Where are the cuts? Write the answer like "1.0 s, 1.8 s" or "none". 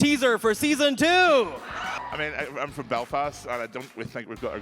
1.9 s